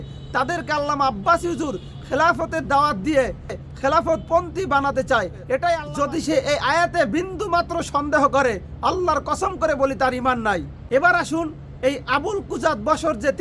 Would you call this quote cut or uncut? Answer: cut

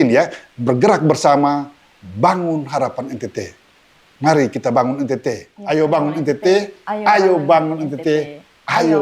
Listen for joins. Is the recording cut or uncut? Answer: cut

